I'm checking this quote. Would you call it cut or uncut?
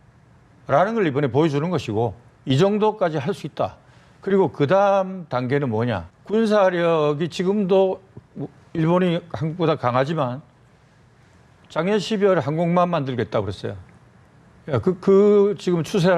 cut